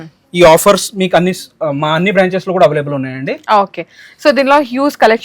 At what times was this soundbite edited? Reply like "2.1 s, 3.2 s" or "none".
none